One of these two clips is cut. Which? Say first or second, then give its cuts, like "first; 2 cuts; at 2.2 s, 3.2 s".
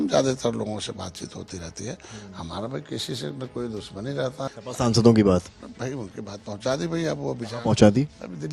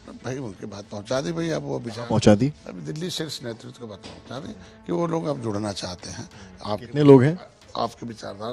first; 1 cut; at 4.5 s